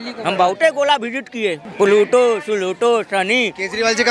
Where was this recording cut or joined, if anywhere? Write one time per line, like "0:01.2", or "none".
0:01.6